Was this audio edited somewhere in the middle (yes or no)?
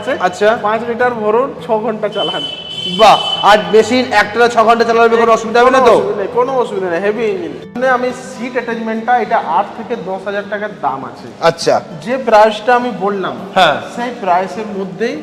yes